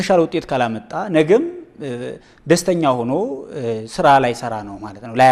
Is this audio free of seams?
yes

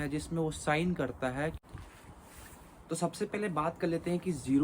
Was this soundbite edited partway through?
yes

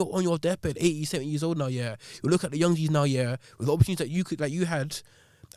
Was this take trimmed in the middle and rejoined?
no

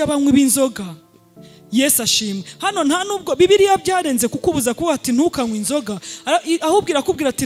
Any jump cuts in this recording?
no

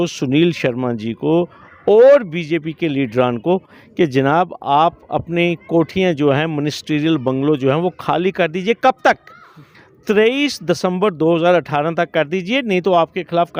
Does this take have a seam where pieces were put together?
no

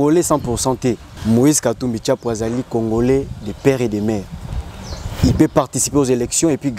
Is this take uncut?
no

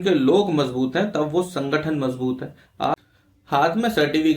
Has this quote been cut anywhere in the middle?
yes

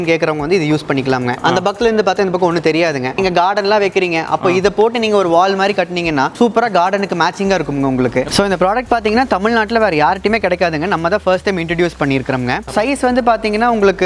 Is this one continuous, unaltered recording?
no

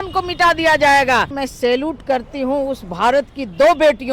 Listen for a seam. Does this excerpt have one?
yes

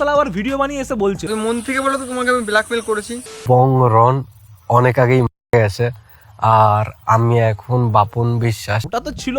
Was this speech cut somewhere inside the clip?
yes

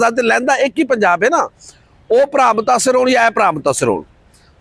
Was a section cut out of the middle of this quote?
no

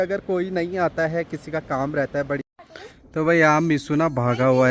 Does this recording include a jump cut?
yes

